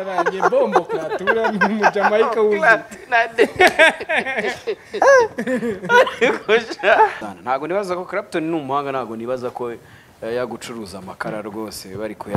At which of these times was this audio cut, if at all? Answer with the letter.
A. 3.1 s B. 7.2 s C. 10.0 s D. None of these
B